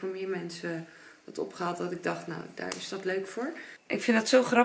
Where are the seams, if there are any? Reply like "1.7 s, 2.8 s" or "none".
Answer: 3.7 s